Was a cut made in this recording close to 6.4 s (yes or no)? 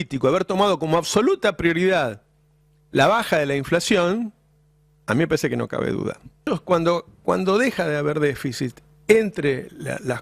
yes